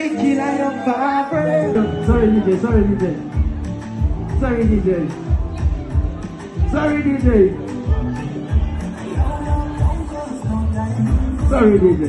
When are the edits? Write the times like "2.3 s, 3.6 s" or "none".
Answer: 1.8 s